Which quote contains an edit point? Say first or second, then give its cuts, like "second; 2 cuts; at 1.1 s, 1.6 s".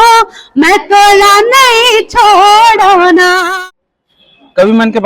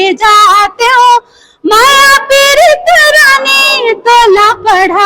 first; 1 cut; at 3.6 s